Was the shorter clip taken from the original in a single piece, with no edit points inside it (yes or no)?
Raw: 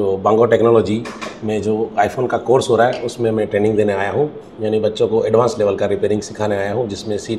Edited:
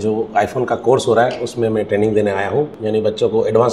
no